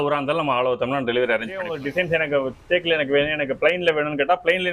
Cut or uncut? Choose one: cut